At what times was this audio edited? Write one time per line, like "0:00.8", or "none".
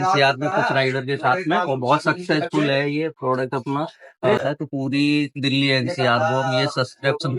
0:04.4